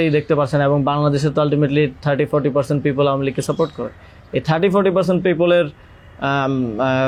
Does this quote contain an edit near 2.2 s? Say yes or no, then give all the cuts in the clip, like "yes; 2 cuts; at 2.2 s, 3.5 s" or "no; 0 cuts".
no; 0 cuts